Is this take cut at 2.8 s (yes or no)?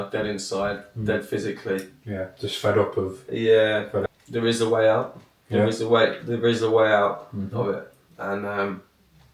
no